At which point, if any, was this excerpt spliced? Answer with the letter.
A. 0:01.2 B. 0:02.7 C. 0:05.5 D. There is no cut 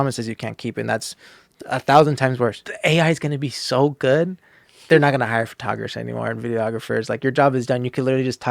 B